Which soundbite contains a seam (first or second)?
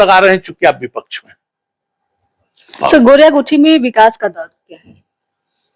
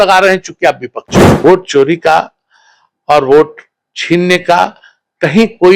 second